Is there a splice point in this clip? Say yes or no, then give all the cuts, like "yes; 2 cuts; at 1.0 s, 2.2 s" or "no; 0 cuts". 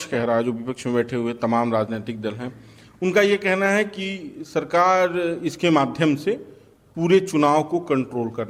no; 0 cuts